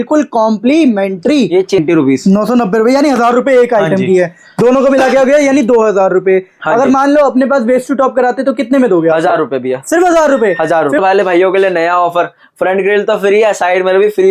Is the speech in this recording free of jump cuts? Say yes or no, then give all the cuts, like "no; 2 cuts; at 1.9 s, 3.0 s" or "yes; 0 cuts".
no; 2 cuts; at 1.8 s, 11.0 s